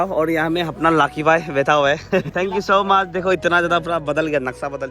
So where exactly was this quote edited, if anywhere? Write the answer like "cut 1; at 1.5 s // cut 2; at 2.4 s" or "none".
cut 1; at 2.3 s